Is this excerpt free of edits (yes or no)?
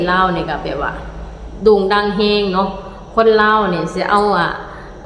yes